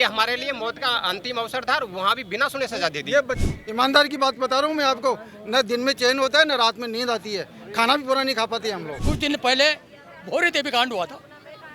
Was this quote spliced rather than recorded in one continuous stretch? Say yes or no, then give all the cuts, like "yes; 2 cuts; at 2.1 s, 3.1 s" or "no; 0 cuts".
yes; 2 cuts; at 3.4 s, 8.9 s